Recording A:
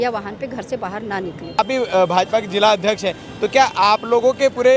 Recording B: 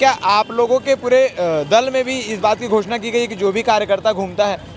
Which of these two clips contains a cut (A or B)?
A